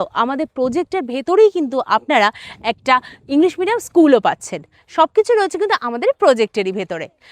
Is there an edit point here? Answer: no; 0 cuts

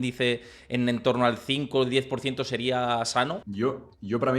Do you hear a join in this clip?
yes; 1 cut; at 3.5 s

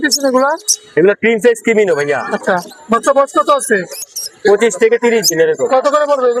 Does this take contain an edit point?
no; 0 cuts

